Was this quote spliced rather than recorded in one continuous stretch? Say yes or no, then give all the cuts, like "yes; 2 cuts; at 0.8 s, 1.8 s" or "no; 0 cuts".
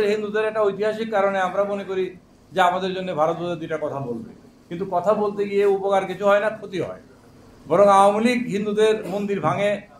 no; 0 cuts